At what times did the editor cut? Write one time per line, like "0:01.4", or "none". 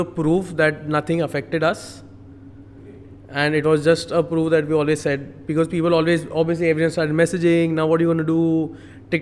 none